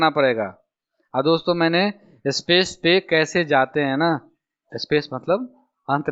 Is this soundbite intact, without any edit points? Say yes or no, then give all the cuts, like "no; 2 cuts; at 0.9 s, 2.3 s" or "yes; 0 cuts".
yes; 0 cuts